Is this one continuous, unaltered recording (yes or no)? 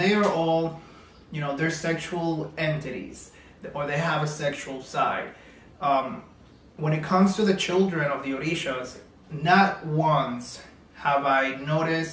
yes